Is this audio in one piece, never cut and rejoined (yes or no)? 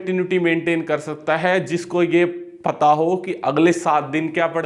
yes